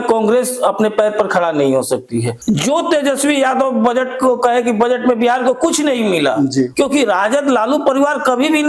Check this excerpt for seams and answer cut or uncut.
cut